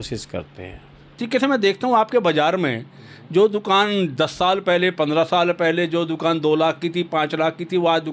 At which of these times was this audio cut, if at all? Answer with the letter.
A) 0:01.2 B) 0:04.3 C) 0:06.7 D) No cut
A